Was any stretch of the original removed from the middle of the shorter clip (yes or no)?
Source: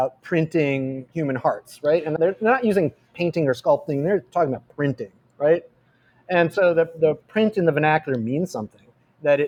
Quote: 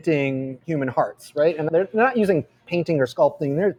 no